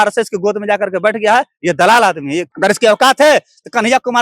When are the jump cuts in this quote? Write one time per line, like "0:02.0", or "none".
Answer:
0:02.4